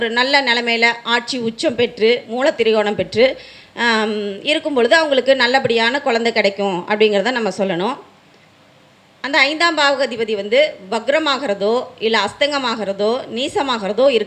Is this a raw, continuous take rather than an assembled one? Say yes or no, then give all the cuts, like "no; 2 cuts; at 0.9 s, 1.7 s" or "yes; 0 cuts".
yes; 0 cuts